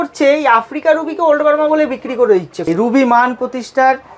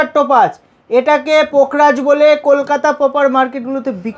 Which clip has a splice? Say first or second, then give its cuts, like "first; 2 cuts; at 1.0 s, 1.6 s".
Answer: first; 1 cut; at 2.6 s